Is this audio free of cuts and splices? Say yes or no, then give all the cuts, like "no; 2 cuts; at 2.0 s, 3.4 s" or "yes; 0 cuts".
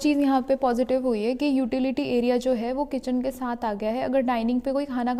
yes; 0 cuts